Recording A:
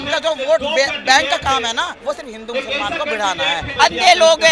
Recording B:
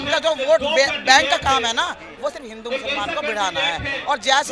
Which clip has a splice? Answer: A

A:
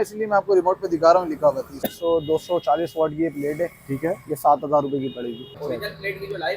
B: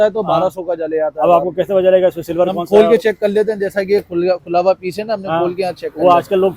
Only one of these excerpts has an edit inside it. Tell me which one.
A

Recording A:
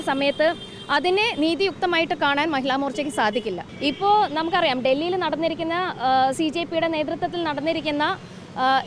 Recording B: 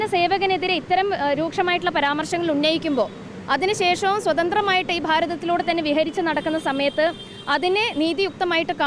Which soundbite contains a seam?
A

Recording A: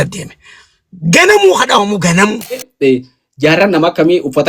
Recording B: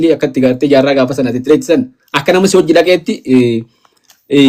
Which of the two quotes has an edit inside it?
A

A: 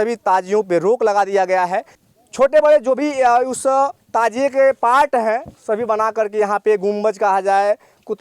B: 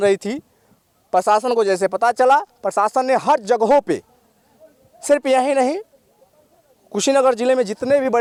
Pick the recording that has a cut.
A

